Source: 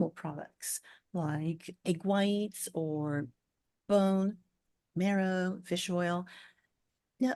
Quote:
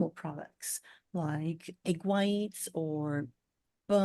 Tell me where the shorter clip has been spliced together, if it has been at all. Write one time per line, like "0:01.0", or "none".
none